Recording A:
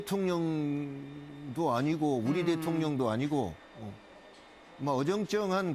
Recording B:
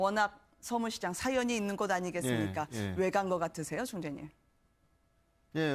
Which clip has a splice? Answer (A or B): A